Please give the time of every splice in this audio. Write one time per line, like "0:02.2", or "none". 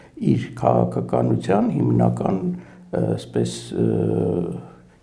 none